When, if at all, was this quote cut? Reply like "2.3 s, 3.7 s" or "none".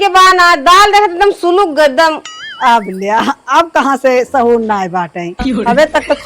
none